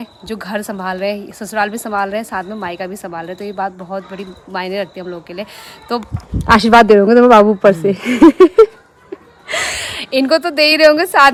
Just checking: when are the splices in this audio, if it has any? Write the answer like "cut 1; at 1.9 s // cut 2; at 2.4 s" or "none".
none